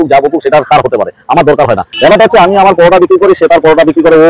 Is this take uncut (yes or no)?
no